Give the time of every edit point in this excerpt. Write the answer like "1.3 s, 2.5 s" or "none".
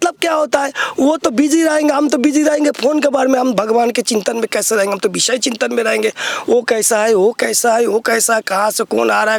none